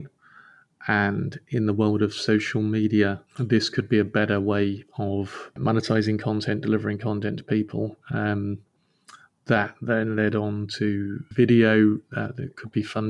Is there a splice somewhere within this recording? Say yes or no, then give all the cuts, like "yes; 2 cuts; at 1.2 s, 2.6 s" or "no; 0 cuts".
yes; 3 cuts; at 3.3 s, 5.5 s, 11.2 s